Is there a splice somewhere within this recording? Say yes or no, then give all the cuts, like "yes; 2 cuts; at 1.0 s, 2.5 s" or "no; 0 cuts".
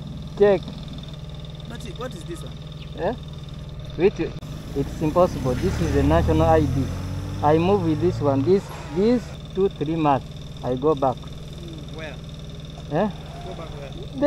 yes; 2 cuts; at 1.6 s, 9.4 s